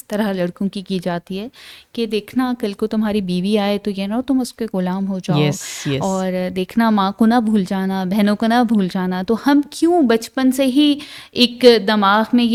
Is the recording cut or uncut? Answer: uncut